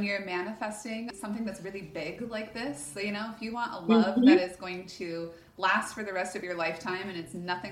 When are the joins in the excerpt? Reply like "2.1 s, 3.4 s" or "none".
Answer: 1.1 s